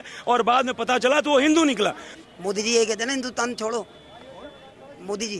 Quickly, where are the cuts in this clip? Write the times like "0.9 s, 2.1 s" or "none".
2.1 s